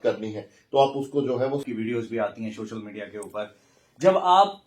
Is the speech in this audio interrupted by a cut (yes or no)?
yes